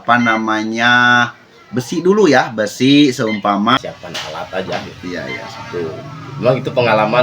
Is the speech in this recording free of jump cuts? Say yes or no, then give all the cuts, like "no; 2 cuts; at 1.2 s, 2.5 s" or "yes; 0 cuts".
no; 1 cut; at 3.8 s